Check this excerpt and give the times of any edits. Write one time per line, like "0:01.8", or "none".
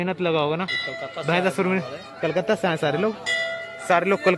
none